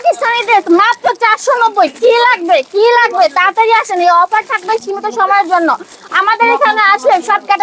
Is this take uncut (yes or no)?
yes